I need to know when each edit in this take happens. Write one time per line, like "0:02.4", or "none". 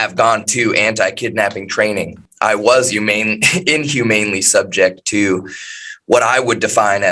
0:02.2